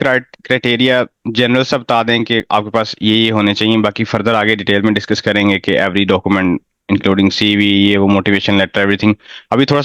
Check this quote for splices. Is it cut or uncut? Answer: uncut